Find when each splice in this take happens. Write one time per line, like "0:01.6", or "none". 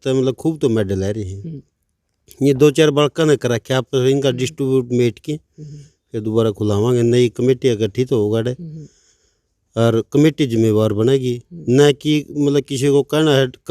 none